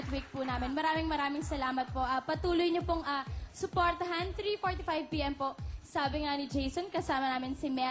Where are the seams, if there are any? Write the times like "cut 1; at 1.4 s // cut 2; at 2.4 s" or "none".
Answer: none